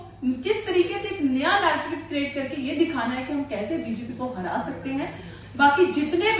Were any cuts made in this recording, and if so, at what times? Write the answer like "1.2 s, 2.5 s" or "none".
5.3 s